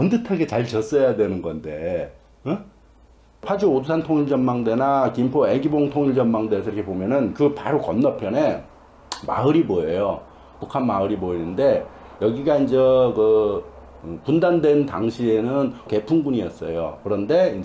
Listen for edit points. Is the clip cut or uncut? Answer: cut